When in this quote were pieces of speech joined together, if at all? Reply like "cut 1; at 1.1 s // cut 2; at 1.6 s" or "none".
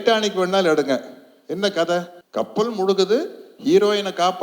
cut 1; at 2.2 s